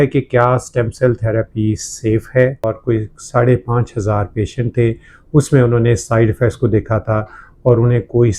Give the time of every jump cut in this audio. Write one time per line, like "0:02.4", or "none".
0:02.8